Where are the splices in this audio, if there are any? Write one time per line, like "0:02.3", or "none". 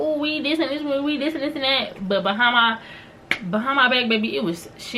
none